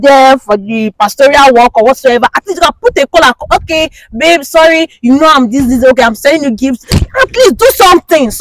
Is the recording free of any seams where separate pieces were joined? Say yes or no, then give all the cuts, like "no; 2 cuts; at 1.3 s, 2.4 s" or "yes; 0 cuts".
yes; 0 cuts